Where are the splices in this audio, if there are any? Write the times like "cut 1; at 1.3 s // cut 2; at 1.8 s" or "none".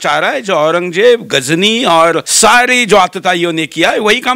cut 1; at 2.3 s